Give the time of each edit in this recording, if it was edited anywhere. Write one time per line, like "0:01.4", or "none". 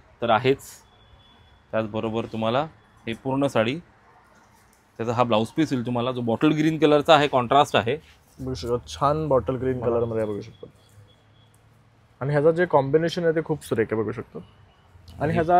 none